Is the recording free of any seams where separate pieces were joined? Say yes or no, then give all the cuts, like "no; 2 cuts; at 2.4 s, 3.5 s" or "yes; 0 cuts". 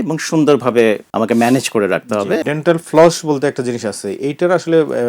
no; 2 cuts; at 1.1 s, 2.4 s